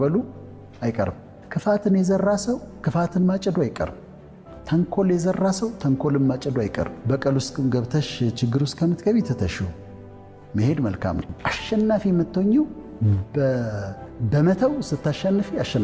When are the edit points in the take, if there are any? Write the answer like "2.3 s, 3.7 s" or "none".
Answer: 1.3 s, 11.3 s